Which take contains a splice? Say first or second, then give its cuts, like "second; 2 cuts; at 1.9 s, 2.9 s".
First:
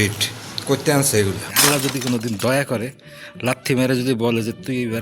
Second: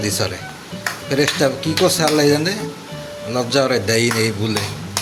first; 1 cut; at 1.5 s